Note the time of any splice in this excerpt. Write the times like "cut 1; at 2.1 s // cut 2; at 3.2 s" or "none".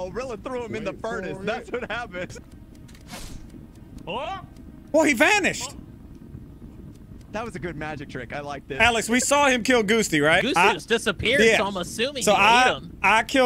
cut 1; at 2.3 s // cut 2; at 8.6 s // cut 3; at 10.4 s

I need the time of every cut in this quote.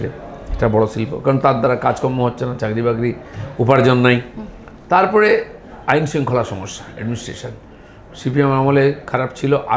none

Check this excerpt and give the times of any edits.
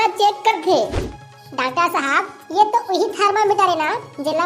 cut 1; at 1.0 s

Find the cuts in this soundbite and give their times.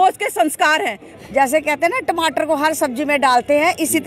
cut 1; at 1.1 s

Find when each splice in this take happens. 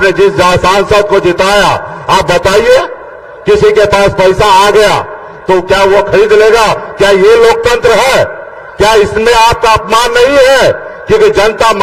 none

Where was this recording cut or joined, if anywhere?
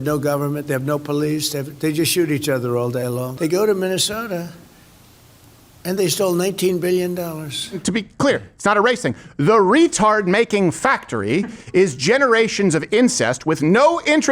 cut 1; at 3.3 s // cut 2; at 7.8 s

